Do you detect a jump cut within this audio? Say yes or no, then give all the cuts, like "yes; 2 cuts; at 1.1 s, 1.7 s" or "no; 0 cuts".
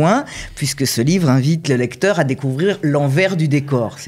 yes; 1 cut; at 1.6 s